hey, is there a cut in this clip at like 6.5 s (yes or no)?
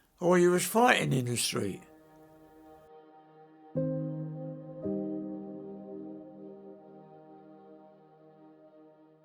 no